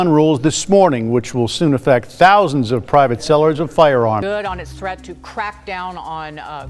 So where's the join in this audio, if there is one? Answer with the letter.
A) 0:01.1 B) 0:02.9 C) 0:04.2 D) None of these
C